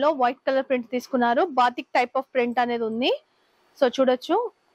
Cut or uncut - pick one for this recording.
uncut